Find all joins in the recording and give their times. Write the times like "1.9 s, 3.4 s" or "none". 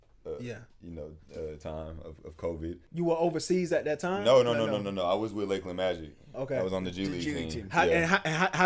2.8 s